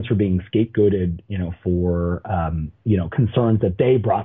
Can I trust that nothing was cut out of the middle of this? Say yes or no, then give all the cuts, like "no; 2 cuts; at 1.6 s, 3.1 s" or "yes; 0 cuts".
yes; 0 cuts